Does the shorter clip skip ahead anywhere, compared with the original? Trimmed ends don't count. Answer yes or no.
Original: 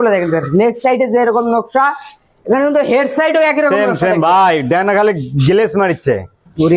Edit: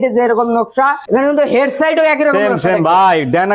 yes